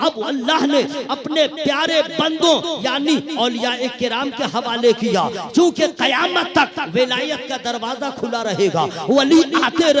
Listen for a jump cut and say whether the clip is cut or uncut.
uncut